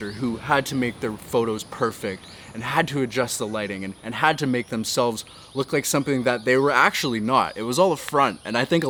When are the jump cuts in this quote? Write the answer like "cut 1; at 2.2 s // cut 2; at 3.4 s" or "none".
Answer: none